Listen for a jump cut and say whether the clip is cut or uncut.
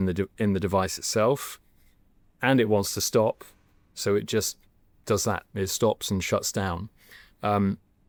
uncut